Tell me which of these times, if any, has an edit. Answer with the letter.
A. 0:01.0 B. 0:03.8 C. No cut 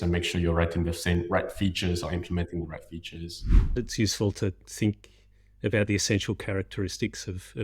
B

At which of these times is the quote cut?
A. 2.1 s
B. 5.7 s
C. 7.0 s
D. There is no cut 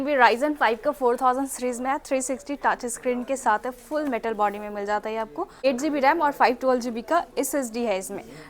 B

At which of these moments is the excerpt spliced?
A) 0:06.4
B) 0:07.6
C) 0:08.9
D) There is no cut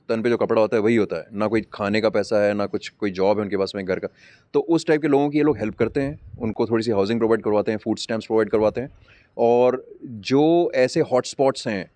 D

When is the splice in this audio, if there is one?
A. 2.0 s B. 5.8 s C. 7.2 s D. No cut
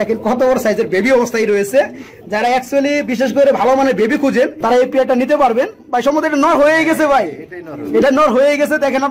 D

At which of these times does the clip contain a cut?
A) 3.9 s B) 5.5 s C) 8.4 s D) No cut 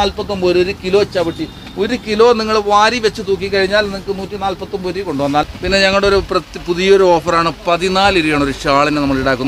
B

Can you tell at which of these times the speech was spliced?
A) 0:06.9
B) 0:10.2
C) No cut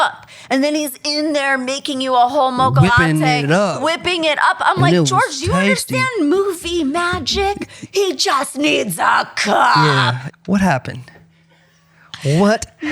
B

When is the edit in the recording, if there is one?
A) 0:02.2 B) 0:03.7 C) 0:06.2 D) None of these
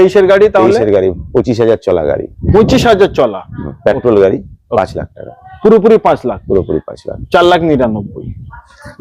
D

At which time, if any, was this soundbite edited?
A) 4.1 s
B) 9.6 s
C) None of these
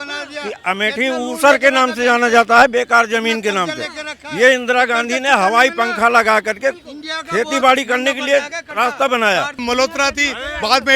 B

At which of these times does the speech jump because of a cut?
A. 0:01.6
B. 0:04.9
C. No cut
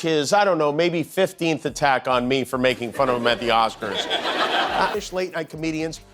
B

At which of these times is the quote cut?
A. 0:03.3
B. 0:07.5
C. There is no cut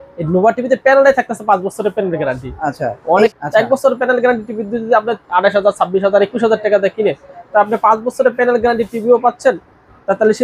A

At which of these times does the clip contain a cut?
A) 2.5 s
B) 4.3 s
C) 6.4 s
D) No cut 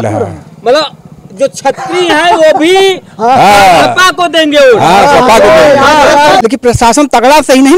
C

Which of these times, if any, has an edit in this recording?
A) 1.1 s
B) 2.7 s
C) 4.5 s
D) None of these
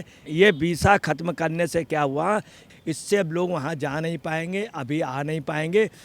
B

